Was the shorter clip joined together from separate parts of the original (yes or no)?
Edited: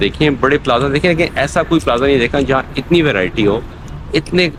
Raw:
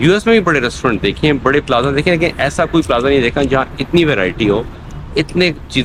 no